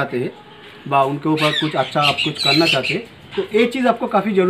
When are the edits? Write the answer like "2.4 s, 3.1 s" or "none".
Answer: none